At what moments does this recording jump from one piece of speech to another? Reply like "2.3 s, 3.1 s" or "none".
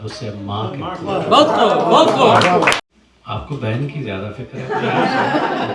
2.9 s